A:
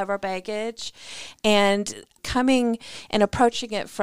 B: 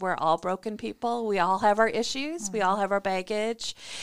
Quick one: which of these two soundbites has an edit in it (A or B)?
A